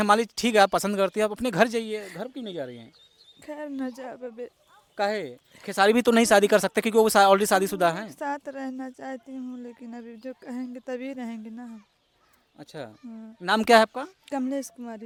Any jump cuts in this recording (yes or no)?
no